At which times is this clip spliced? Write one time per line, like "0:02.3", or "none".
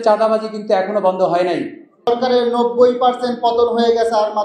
0:02.1